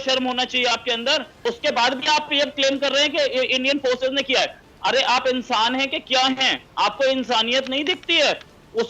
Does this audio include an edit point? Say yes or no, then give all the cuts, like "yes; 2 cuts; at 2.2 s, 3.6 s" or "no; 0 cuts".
yes; 1 cut; at 1.4 s